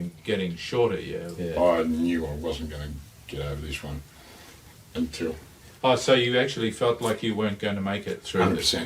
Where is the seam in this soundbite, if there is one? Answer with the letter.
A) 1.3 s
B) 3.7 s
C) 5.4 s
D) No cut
A